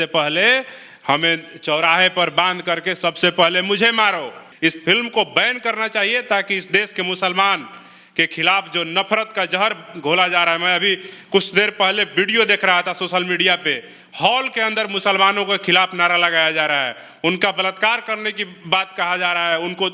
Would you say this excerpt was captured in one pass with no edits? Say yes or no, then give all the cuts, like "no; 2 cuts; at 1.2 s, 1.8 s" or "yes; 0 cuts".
no; 1 cut; at 4.4 s